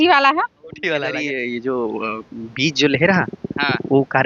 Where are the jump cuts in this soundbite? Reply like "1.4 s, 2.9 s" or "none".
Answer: 1.0 s